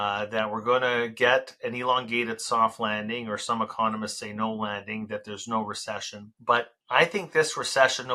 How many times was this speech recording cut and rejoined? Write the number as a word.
one